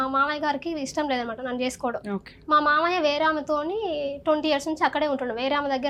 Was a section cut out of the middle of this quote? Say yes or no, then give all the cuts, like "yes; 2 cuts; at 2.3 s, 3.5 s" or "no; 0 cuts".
no; 0 cuts